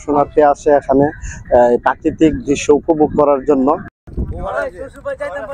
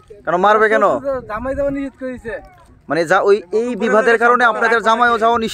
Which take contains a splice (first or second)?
first